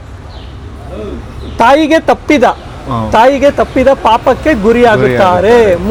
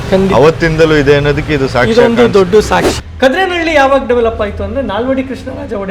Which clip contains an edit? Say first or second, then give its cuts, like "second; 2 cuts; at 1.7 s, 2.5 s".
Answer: second; 1 cut; at 2.9 s